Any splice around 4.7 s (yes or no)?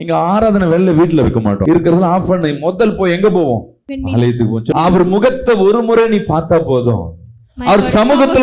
yes